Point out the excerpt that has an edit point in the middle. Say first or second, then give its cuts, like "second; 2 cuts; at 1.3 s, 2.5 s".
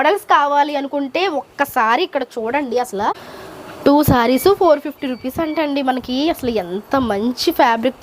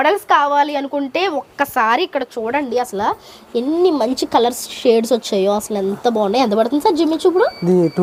first; 1 cut; at 3.3 s